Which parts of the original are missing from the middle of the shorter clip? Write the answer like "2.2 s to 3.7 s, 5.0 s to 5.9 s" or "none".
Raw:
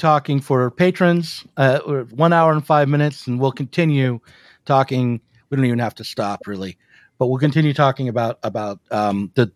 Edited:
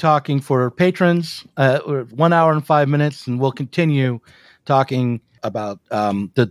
5.4 s to 8.4 s